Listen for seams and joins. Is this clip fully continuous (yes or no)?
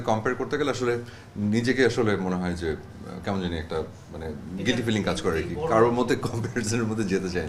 yes